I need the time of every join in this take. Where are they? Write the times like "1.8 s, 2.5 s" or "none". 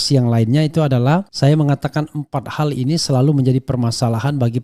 1.3 s